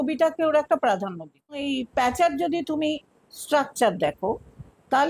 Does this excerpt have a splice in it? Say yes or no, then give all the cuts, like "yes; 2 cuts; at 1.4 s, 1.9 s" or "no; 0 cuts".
yes; 1 cut; at 1.6 s